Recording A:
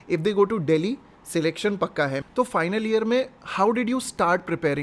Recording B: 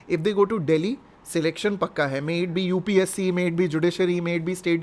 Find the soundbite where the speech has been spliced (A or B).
A